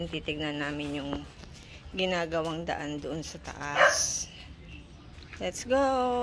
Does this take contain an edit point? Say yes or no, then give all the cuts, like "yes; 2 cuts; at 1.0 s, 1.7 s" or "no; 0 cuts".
no; 0 cuts